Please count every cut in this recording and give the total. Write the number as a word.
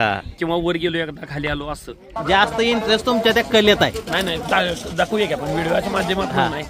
one